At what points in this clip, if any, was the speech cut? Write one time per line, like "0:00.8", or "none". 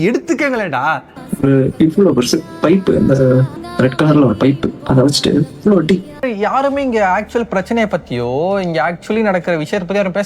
0:01.1
0:03.6
0:06.2